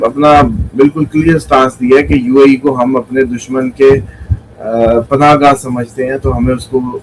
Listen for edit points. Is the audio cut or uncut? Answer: uncut